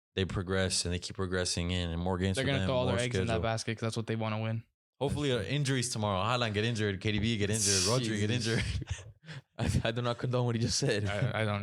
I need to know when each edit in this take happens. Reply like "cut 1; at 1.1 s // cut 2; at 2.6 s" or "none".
none